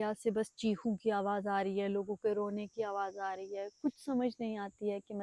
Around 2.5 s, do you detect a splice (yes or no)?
no